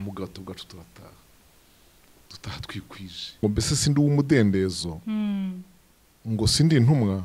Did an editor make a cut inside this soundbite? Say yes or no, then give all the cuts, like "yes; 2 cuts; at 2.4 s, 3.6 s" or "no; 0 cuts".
yes; 1 cut; at 3.4 s